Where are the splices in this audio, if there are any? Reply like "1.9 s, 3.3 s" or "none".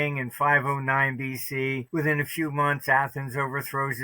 1.8 s